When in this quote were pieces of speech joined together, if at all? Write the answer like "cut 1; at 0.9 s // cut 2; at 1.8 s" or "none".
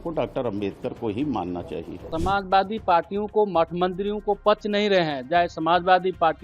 cut 1; at 2.0 s

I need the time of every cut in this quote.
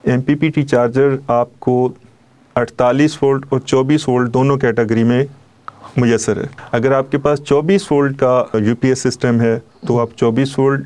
cut 1; at 6.5 s // cut 2; at 8.5 s

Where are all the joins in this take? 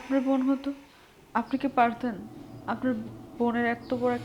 none

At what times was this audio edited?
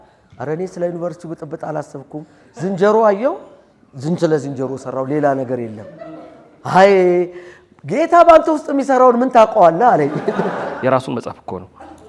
cut 1; at 10.7 s

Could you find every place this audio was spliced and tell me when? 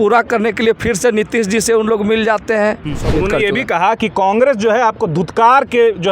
cut 1; at 3.1 s

